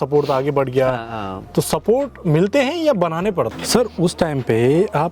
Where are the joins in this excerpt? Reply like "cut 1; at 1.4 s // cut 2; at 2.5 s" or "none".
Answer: cut 1; at 3.6 s